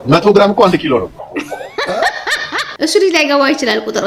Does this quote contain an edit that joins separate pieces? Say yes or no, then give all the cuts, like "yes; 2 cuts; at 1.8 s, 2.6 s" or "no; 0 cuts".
no; 0 cuts